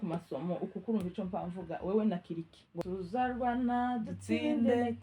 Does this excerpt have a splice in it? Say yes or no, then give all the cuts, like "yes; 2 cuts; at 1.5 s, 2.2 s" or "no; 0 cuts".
yes; 1 cut; at 2.7 s